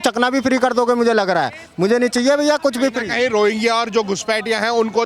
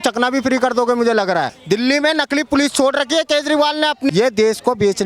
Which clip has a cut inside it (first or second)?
second